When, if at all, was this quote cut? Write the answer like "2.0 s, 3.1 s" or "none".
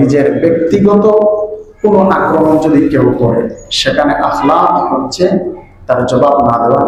none